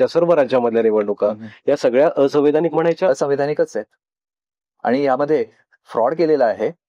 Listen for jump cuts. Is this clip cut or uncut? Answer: uncut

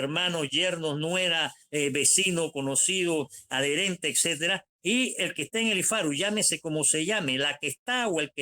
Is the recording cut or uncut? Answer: uncut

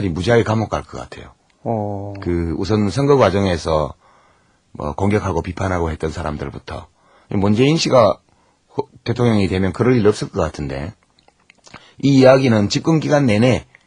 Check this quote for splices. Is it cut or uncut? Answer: cut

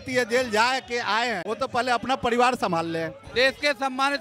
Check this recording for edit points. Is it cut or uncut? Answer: cut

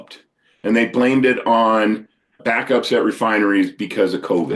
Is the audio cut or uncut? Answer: cut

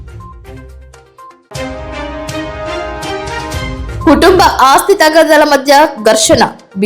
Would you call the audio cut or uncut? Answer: cut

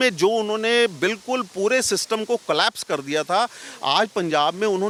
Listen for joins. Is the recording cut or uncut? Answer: uncut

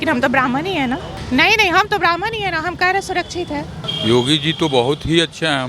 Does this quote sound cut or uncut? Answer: cut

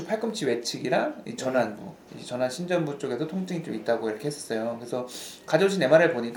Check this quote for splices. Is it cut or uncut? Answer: uncut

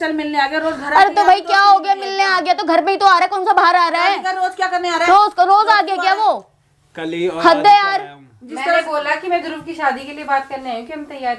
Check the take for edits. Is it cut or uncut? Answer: uncut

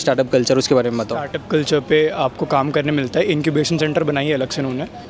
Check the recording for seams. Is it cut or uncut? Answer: uncut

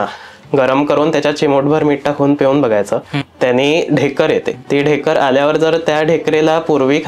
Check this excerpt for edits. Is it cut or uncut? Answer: cut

